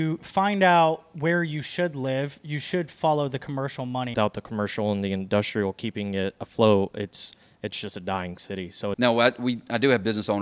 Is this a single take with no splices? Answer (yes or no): no